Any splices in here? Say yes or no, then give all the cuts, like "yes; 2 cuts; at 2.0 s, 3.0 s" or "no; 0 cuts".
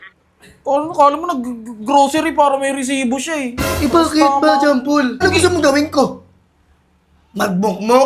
yes; 1 cut; at 5.2 s